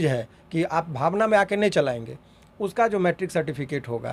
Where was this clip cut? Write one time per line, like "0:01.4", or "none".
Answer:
none